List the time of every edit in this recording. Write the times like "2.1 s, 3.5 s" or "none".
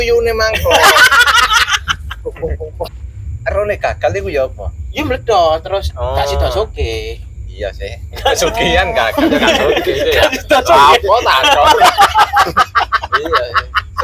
2.8 s